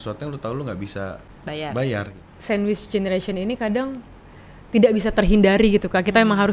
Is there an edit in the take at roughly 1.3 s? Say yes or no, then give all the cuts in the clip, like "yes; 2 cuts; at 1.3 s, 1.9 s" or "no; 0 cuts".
yes; 2 cuts; at 1.3 s, 2.2 s